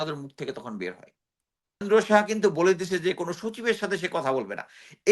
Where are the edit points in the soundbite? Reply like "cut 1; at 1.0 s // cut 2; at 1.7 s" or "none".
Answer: cut 1; at 1.8 s

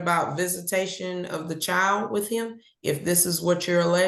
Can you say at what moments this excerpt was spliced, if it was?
none

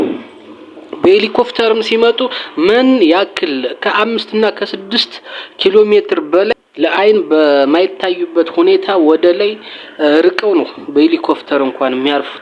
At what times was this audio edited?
cut 1; at 6.5 s

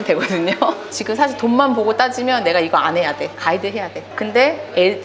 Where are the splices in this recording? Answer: cut 1; at 0.9 s // cut 2; at 4.1 s

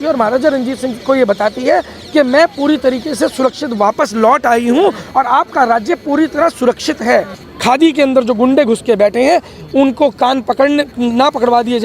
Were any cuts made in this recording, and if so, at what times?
cut 1; at 7.4 s

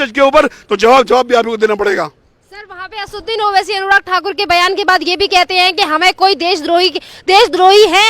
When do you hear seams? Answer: none

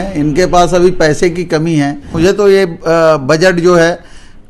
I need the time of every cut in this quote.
cut 1; at 2.1 s

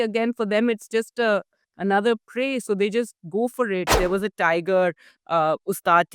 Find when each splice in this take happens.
cut 1; at 3.9 s

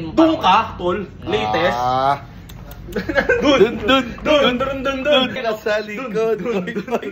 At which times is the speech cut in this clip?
cut 1; at 5.4 s

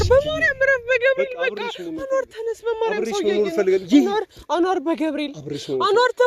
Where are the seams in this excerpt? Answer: none

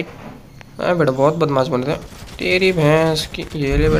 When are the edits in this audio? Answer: none

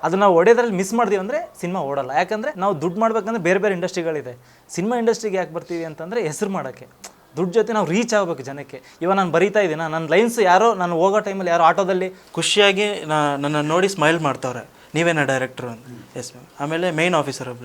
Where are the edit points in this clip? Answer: cut 1; at 2.5 s // cut 2; at 12.2 s

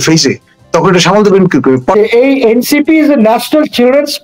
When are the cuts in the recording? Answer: cut 1; at 1.9 s

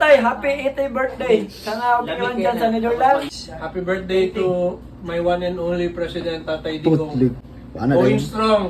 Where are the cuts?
cut 1; at 3.3 s // cut 2; at 7.4 s

